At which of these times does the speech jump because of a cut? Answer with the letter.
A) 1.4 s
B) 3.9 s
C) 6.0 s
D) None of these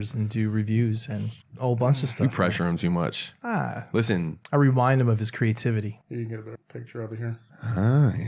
C